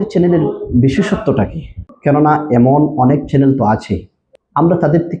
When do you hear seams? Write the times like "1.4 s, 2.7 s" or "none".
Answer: none